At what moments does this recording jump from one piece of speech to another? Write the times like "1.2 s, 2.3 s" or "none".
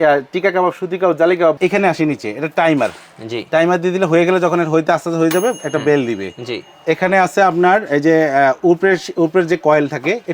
1.6 s